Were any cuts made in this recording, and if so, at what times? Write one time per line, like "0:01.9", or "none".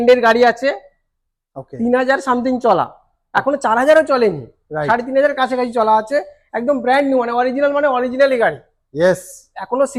none